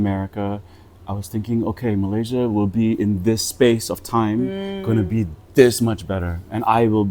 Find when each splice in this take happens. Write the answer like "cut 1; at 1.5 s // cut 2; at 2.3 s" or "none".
none